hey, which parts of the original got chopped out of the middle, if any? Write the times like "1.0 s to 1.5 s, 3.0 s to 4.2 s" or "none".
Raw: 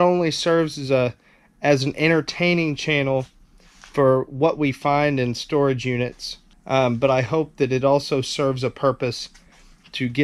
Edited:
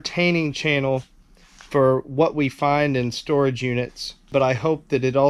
6.5 s to 7.0 s